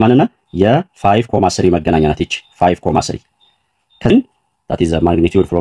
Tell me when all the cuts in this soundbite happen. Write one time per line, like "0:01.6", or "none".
0:04.1